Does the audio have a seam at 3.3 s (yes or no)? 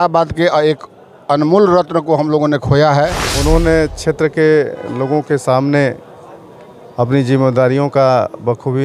yes